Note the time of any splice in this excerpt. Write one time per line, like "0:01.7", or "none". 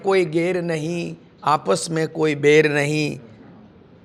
none